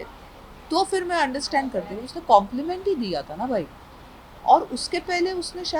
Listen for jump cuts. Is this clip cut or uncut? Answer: uncut